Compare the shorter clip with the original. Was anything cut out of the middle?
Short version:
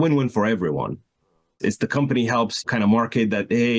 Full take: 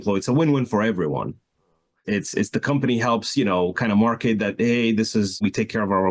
yes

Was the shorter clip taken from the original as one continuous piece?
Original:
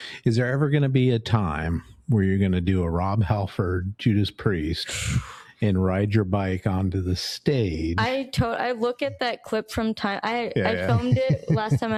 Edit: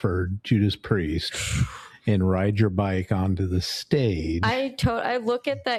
yes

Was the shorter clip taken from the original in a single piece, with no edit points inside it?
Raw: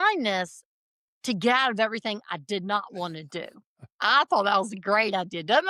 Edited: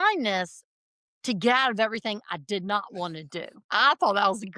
no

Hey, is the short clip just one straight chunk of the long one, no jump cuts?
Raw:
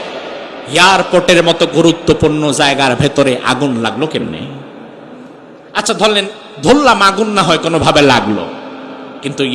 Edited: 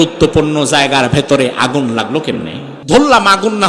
no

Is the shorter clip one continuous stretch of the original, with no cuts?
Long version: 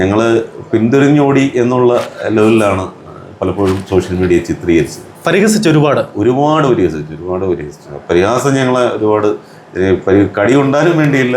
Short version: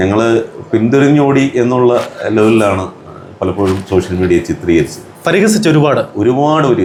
yes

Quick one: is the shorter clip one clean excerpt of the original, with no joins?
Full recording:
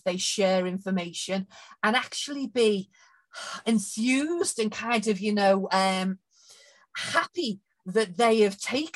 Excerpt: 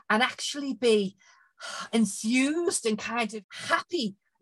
no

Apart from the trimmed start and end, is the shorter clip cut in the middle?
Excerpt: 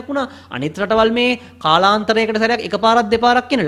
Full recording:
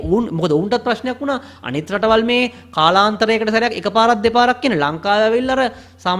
no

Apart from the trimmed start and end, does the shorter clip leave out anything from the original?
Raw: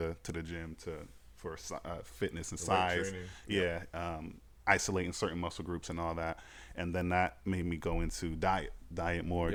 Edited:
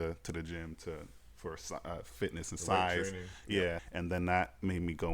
yes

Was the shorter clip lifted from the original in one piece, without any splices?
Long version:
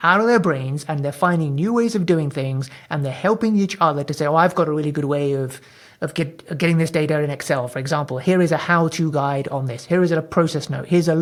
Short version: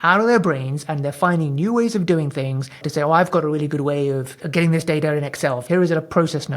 no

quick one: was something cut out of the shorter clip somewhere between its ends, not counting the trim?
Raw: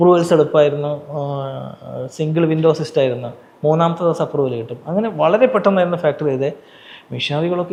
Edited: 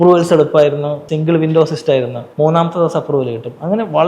yes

